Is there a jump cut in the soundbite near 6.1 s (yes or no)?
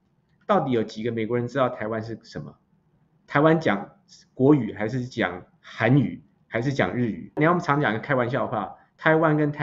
no